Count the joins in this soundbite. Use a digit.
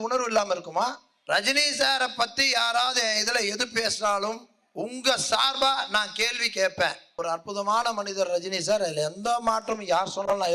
2